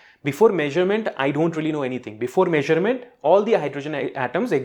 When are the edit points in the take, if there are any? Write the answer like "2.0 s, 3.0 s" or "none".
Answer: none